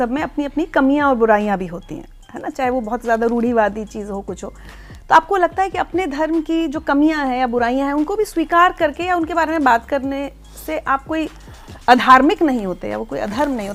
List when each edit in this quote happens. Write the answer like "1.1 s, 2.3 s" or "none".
none